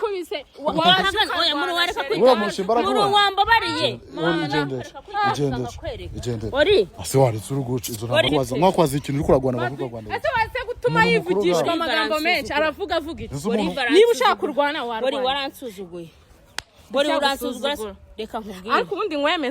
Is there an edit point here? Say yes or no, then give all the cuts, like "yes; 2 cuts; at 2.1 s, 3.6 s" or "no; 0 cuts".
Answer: yes; 1 cut; at 8.3 s